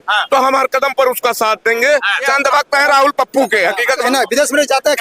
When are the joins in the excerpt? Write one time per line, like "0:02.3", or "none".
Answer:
0:02.3
0:04.1